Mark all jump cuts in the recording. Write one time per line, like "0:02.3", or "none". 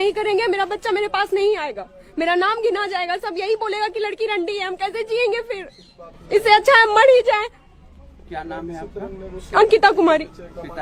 none